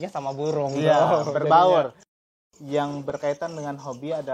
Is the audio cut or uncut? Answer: cut